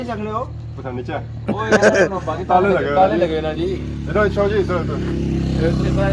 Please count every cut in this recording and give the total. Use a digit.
0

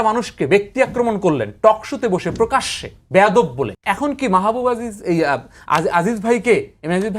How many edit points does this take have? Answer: 1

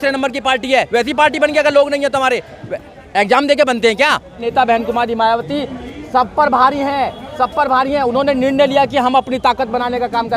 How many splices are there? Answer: 1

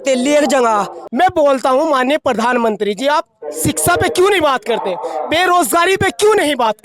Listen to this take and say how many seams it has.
1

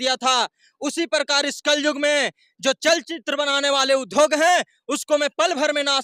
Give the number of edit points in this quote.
0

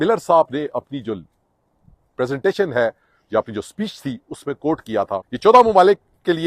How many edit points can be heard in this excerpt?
1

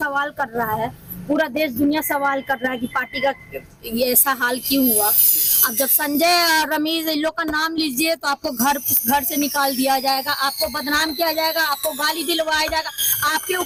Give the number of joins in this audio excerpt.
0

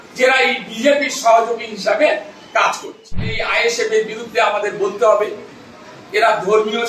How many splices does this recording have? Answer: 1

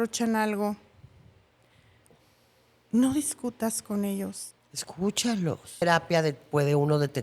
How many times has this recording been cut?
1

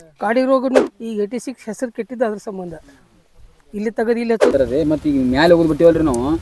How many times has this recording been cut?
2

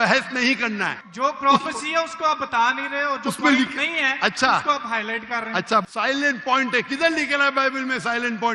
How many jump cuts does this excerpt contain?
2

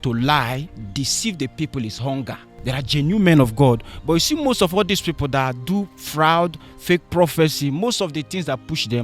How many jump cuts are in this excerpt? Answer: 1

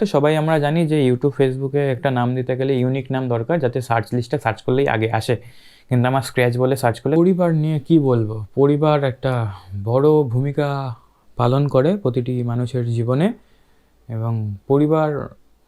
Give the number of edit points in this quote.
1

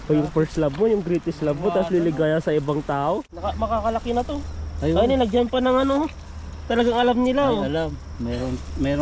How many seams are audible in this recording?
1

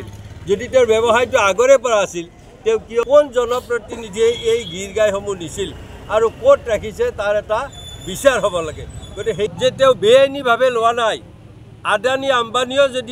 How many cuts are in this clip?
2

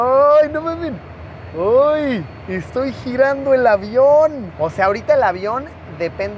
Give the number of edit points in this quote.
1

